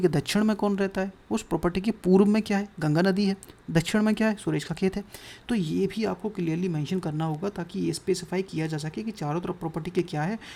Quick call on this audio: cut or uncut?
uncut